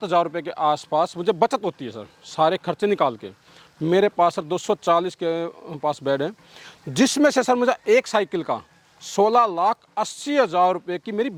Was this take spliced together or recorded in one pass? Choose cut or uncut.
uncut